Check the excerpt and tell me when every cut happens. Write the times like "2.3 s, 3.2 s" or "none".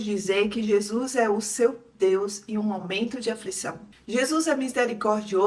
3.9 s